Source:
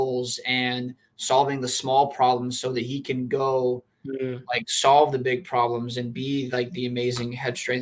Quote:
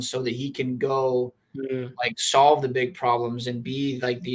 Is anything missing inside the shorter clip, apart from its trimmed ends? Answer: no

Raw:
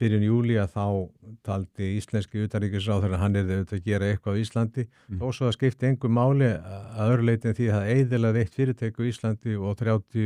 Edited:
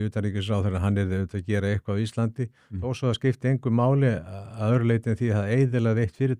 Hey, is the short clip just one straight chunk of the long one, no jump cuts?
yes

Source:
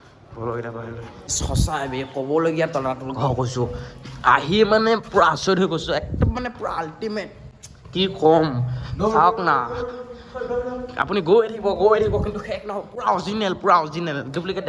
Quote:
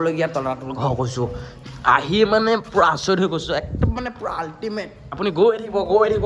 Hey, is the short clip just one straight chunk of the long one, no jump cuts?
no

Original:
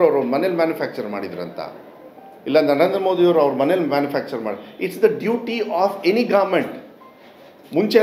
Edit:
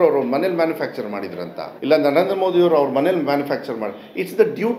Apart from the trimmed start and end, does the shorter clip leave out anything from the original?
yes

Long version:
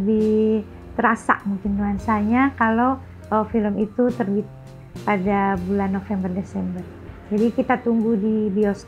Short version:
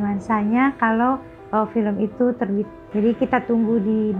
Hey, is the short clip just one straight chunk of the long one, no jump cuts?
no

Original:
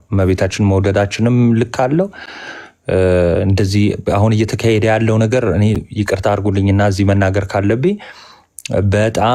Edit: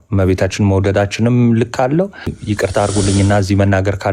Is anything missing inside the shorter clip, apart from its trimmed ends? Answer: yes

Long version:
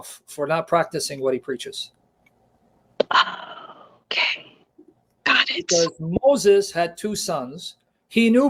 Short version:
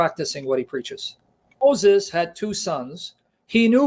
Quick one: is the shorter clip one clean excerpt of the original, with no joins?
no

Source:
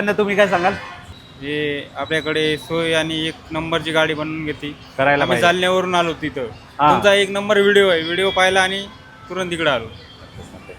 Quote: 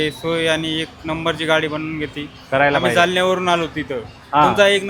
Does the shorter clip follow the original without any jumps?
yes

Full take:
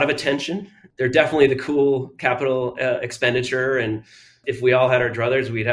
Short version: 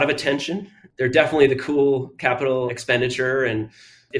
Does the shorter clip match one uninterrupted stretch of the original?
no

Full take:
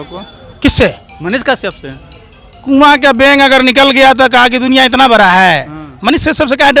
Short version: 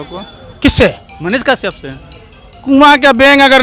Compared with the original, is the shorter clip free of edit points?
yes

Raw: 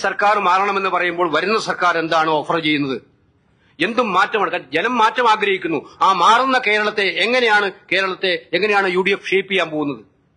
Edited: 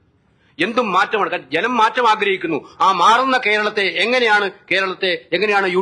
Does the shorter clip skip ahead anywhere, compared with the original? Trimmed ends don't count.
no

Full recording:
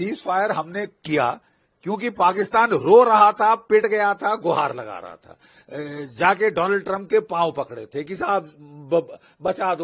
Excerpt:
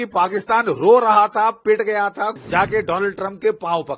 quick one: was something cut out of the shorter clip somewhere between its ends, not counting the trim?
yes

